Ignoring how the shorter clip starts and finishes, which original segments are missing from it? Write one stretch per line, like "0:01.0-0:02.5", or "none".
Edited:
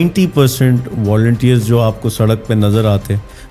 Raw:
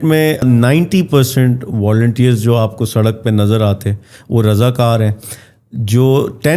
none